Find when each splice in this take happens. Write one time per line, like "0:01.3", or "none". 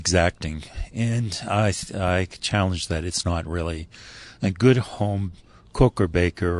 none